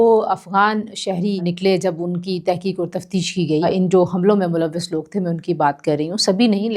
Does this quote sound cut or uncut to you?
cut